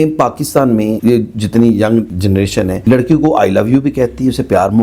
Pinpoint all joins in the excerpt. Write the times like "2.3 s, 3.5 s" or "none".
1.0 s, 2.3 s